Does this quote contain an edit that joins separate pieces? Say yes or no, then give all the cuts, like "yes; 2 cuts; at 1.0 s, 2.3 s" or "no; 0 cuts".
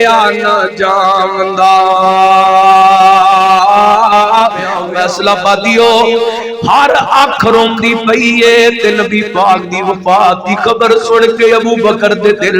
yes; 1 cut; at 4.8 s